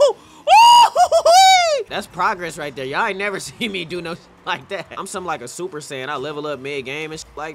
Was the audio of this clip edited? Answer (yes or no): yes